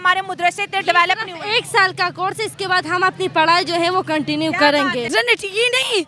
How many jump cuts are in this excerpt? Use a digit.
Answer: 1